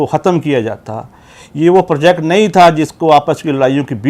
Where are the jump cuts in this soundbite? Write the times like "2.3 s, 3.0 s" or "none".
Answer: none